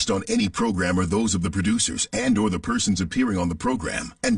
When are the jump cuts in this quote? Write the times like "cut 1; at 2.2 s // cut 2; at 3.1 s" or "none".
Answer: none